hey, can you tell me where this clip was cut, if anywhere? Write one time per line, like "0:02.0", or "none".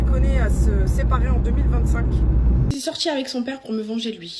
0:02.7